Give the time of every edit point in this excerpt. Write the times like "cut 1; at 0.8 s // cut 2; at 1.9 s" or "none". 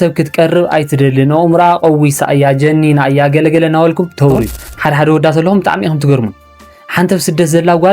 cut 1; at 4.6 s